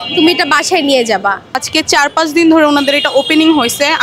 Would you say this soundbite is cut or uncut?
cut